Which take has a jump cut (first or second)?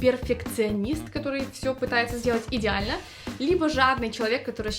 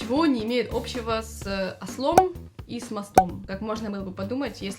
second